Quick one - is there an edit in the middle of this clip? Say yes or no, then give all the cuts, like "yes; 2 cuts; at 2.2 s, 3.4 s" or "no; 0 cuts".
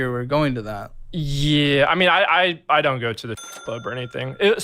yes; 1 cut; at 3.1 s